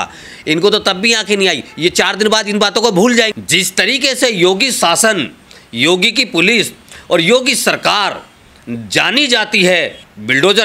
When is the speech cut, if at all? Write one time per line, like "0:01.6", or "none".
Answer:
0:03.3